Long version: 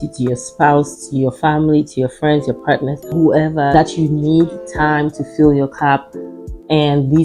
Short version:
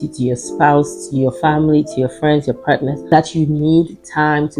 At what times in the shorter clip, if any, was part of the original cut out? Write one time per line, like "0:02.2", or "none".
0:03.1